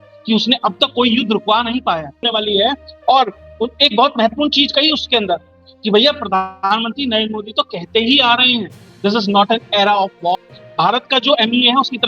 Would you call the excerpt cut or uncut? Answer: cut